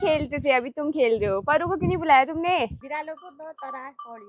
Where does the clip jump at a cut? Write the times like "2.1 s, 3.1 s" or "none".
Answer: none